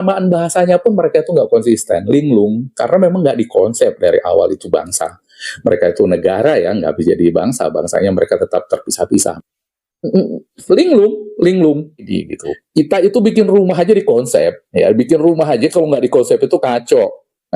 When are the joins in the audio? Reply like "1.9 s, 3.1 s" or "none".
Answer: 12.1 s